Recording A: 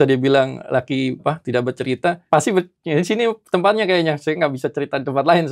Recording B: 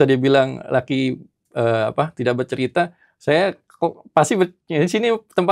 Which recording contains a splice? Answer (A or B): A